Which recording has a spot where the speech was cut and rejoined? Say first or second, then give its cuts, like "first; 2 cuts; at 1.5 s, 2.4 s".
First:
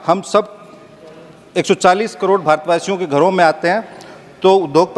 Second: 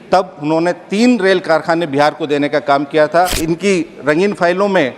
second; 1 cut; at 3.4 s